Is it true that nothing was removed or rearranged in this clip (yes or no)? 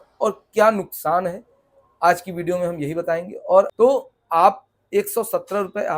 no